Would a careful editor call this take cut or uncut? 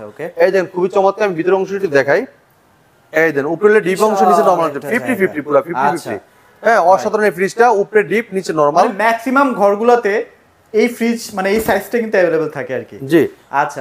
uncut